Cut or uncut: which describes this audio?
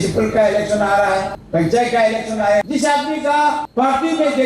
cut